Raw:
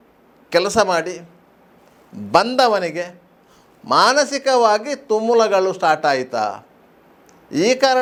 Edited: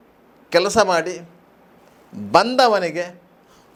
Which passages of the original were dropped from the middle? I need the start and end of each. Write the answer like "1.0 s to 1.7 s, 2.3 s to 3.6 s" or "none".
none